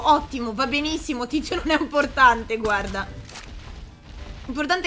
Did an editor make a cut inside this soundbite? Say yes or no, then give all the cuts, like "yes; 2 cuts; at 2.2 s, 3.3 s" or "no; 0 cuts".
no; 0 cuts